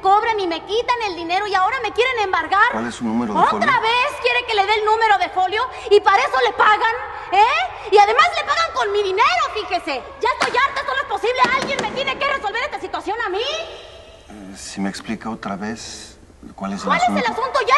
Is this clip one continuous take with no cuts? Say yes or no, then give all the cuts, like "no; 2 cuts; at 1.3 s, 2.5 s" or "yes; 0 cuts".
no; 1 cut; at 8.2 s